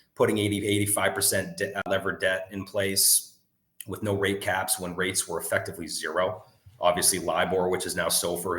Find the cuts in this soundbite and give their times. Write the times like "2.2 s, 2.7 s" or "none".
1.9 s